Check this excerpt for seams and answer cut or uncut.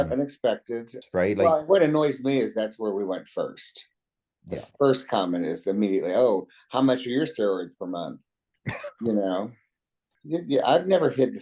uncut